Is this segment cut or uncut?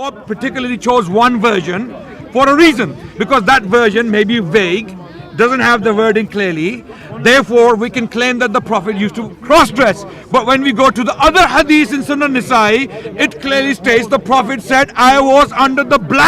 uncut